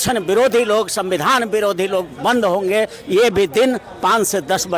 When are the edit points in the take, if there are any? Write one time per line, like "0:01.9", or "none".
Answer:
none